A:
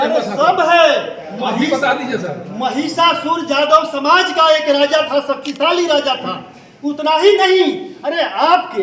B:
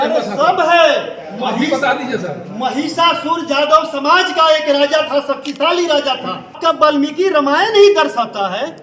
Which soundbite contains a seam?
B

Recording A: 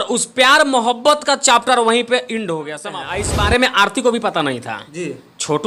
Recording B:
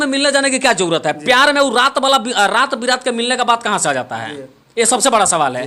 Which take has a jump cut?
A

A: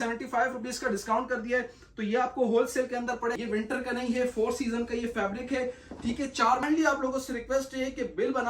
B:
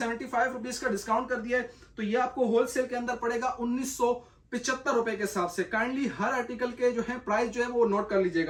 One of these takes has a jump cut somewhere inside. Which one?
A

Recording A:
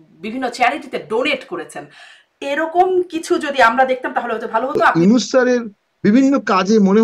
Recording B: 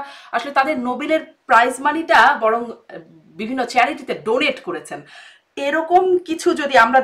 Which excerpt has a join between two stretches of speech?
A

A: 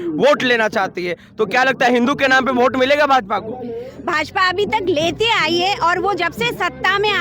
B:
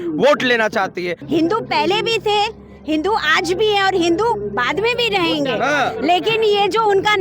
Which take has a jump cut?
B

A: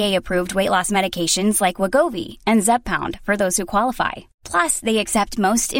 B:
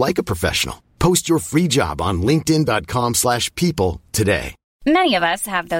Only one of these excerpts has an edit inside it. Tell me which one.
B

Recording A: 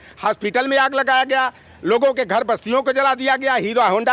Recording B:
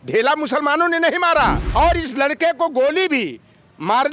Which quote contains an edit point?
B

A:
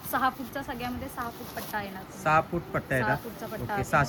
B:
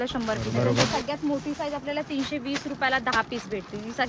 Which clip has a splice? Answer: B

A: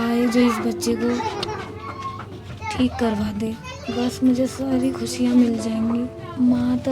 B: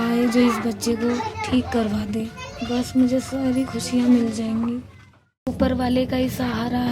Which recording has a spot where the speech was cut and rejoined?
B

